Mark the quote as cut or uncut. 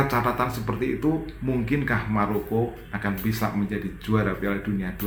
uncut